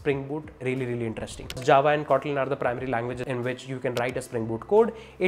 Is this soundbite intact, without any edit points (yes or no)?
no